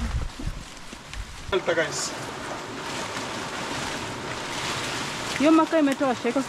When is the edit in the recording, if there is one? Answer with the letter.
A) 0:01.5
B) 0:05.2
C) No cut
A